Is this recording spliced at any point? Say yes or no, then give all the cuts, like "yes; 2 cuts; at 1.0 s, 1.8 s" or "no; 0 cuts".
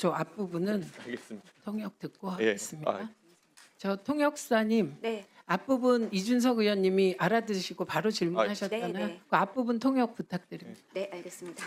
no; 0 cuts